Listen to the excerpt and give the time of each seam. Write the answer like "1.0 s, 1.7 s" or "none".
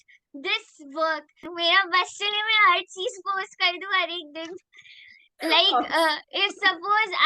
1.5 s